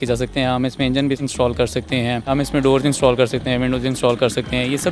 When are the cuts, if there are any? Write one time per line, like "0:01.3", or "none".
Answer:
0:01.3
0:02.3